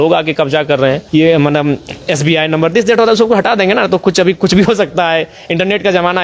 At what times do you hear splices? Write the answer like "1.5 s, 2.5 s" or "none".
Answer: 1.0 s